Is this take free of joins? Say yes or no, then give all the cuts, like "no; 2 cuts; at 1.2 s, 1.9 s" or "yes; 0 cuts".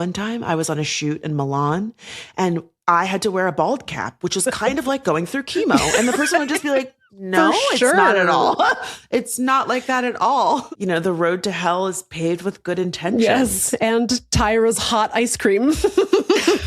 no; 1 cut; at 10.7 s